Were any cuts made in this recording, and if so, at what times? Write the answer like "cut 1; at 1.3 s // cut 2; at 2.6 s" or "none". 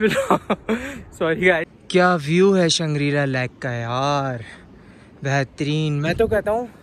cut 1; at 1.7 s